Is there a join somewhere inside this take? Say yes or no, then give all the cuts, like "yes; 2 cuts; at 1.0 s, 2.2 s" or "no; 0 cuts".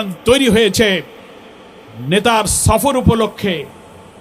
no; 0 cuts